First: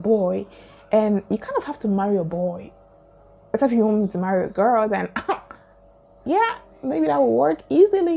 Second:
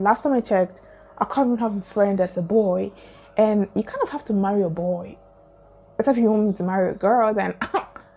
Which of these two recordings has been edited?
second; 1 cut; at 1.4 s

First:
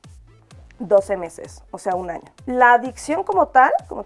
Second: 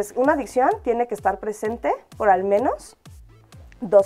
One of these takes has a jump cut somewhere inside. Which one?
first; 1 cut; at 2.3 s

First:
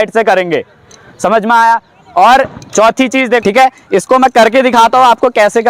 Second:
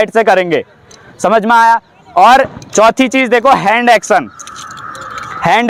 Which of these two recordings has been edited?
first; 1 cut; at 3.4 s

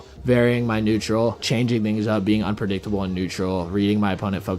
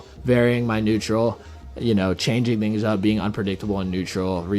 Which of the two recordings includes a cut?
first; 1 cut; at 1.4 s

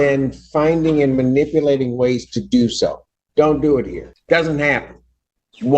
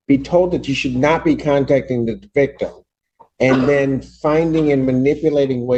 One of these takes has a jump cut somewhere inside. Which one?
first; 1 cut; at 4.1 s

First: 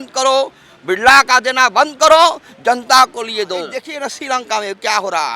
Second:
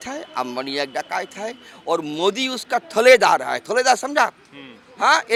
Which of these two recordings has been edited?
first; 1 cut; at 3.8 s

